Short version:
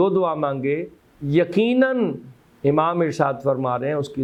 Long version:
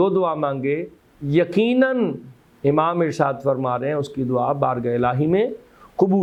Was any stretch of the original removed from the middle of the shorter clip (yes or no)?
no